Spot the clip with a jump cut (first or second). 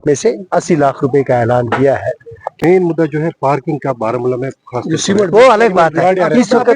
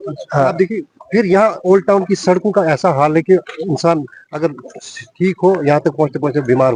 first